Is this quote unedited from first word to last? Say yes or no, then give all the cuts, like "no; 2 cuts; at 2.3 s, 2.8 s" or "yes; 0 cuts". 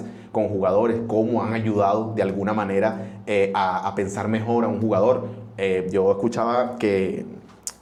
yes; 0 cuts